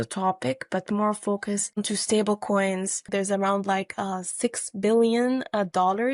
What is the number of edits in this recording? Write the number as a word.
two